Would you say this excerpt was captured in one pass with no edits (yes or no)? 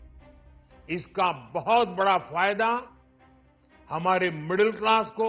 yes